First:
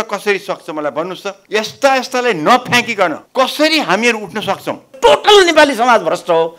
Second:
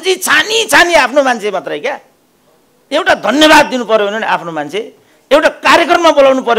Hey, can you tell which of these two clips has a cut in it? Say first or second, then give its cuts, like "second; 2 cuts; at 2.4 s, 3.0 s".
first; 3 cuts; at 1.3 s, 3.2 s, 4.9 s